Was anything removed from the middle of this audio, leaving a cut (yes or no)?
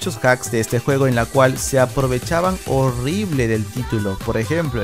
no